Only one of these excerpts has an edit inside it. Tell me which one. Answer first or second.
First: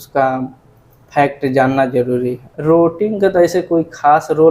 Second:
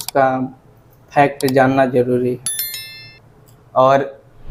first